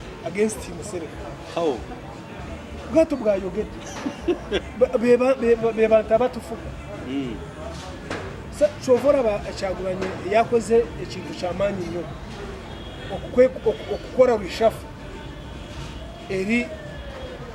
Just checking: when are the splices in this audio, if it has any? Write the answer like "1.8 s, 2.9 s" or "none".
none